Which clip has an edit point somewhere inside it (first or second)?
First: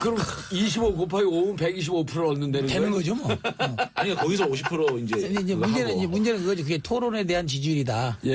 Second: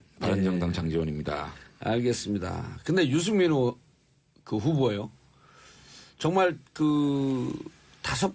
second